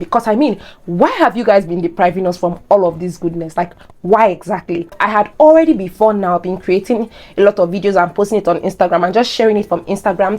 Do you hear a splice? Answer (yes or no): yes